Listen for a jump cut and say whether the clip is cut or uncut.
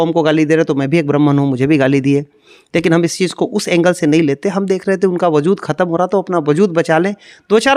uncut